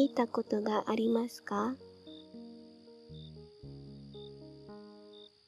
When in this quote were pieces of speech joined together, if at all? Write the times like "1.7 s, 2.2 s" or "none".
1.8 s, 3.4 s